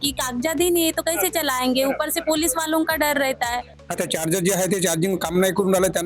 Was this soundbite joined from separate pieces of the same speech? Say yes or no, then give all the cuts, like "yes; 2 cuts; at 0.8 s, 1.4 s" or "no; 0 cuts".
yes; 1 cut; at 3.7 s